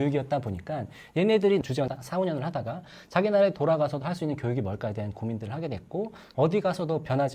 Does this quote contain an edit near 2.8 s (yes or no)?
no